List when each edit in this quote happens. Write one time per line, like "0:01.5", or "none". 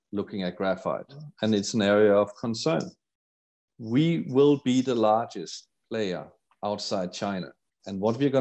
0:01.3
0:03.7